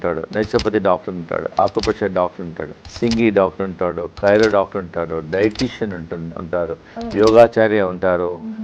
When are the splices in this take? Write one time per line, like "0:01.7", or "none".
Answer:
0:02.6